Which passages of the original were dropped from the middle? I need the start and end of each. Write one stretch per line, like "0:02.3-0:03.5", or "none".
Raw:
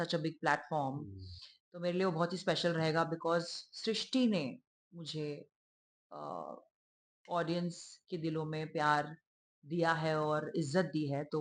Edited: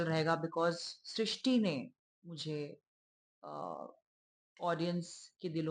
none

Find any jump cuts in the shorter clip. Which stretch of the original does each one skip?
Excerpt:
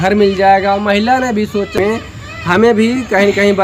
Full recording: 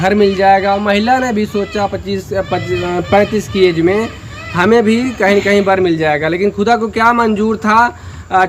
0:01.8-0:03.9

